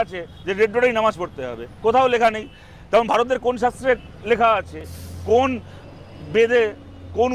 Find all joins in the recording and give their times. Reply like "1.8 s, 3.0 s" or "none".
none

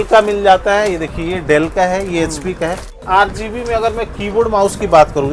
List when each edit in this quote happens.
3.0 s

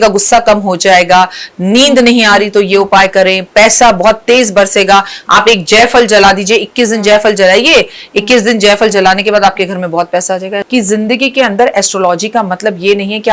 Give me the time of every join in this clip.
10.6 s

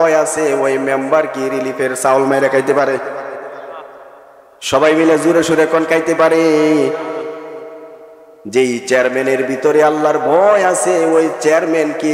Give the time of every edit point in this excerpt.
none

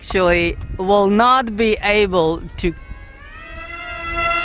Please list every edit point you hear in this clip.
none

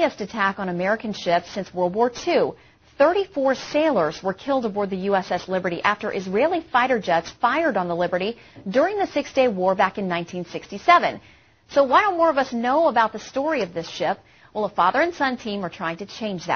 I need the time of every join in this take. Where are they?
8.2 s

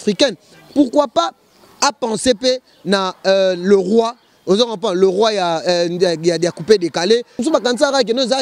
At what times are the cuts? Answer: 7.3 s

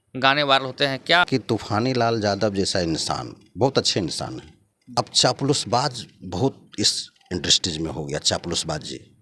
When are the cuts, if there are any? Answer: 1.2 s, 5.0 s

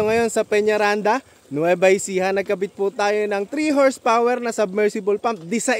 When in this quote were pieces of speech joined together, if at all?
none

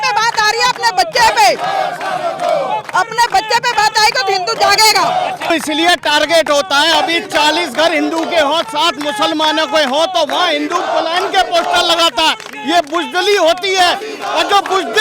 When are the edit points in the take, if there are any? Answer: 5.5 s

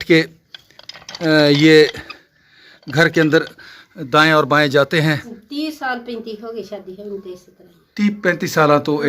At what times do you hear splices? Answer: 5.4 s

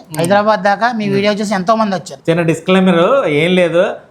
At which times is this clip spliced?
2.1 s

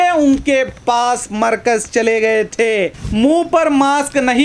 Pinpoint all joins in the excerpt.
3.0 s

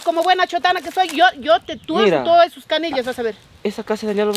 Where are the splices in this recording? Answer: none

